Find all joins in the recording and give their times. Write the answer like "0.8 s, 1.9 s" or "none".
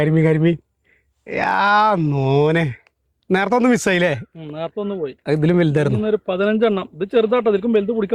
none